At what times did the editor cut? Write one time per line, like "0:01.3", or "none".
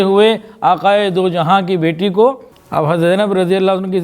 0:02.5